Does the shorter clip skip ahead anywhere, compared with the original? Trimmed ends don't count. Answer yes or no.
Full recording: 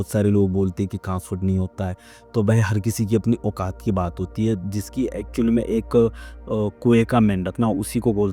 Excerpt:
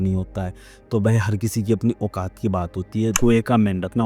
yes